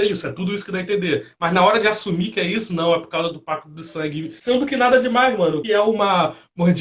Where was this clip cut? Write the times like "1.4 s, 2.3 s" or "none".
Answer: 4.3 s, 5.6 s